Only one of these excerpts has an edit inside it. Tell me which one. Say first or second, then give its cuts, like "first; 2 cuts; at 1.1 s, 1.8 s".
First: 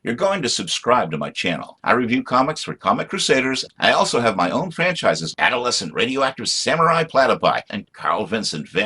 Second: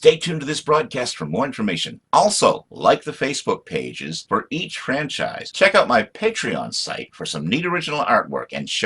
second; 1 cut; at 5.4 s